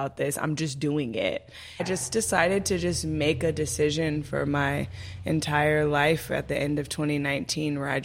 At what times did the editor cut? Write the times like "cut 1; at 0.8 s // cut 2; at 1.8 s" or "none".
cut 1; at 1.8 s